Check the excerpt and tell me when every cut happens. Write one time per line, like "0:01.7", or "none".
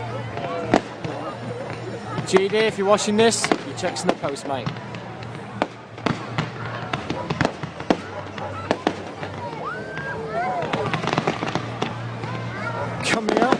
none

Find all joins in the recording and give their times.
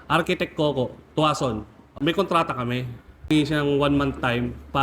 0:01.9
0:03.3

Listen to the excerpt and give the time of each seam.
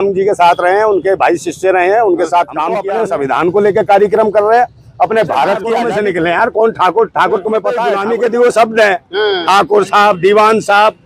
0:02.8
0:05.7
0:07.9

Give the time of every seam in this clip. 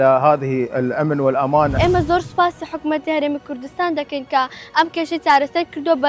0:01.7

